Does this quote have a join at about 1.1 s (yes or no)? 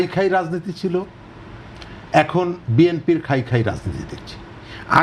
no